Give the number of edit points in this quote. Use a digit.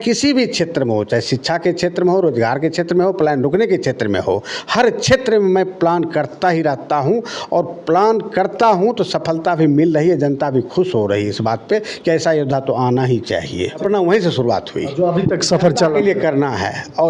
1